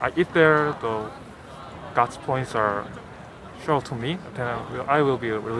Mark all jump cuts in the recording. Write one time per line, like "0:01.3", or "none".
none